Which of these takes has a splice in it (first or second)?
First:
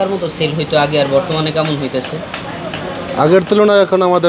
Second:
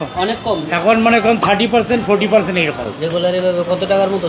second